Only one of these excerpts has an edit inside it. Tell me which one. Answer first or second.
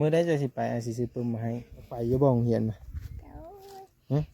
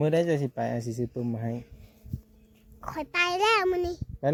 first